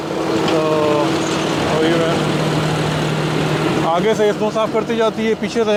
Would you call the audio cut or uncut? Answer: uncut